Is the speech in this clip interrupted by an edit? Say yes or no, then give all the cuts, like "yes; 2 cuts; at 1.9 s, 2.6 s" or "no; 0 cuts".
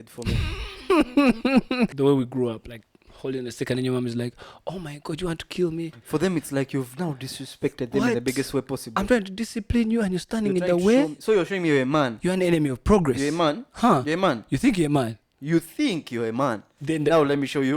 yes; 1 cut; at 1.9 s